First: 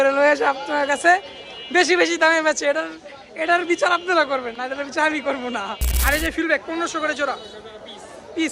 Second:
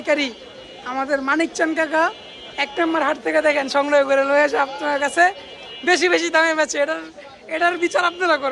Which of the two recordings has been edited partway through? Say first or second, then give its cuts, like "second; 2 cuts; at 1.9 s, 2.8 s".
first; 1 cut; at 5.8 s